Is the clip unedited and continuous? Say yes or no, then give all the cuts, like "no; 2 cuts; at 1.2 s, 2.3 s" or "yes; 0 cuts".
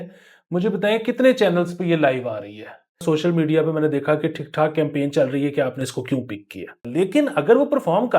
no; 2 cuts; at 3.0 s, 6.8 s